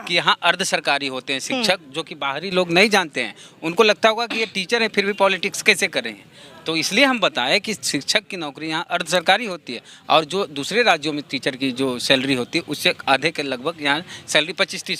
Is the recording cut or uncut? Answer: uncut